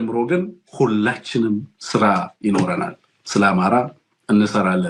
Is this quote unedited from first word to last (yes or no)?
yes